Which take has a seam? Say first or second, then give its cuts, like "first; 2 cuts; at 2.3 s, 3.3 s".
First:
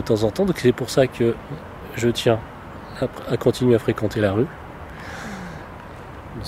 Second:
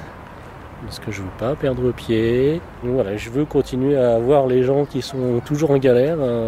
second; 1 cut; at 2.7 s